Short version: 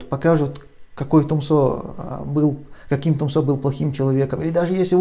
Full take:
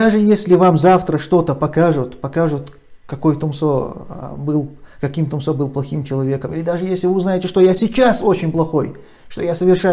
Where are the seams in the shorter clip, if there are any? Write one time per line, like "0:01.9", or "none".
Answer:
none